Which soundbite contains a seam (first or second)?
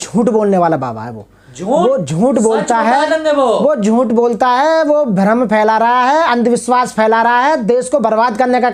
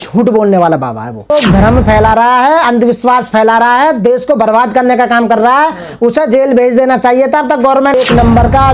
second